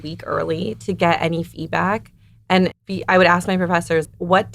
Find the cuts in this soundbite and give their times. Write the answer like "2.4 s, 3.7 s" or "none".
none